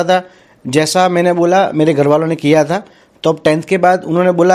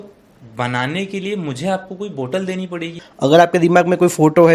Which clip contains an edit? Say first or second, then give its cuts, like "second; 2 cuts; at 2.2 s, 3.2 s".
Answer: second; 1 cut; at 3.0 s